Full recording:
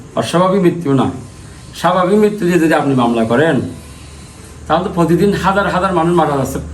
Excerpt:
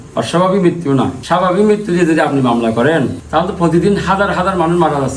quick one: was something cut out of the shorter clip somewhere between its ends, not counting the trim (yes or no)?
yes